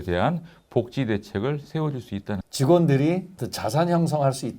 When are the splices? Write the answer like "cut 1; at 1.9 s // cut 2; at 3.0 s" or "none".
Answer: cut 1; at 2.4 s